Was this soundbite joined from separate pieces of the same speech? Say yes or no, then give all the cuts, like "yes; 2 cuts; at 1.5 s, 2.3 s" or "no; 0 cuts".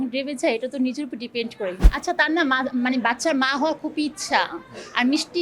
yes; 1 cut; at 1.8 s